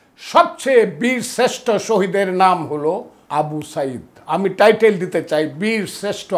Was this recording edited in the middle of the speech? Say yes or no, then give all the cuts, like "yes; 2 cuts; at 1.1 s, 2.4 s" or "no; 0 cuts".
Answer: yes; 1 cut; at 3.2 s